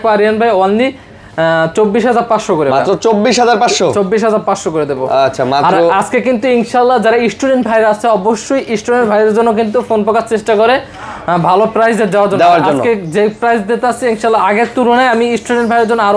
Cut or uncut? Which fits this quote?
uncut